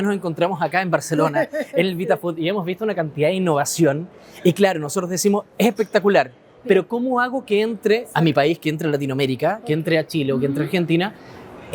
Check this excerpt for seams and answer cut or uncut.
uncut